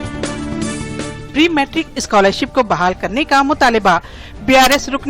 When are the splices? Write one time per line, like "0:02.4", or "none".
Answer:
0:01.2